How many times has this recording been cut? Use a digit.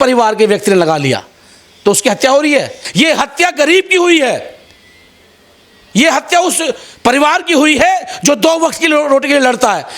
1